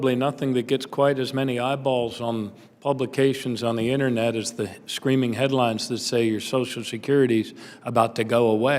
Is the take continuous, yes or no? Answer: yes